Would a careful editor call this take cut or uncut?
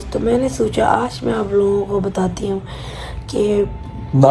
uncut